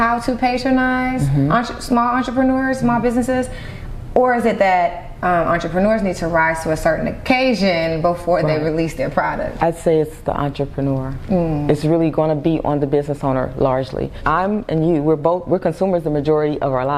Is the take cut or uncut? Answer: cut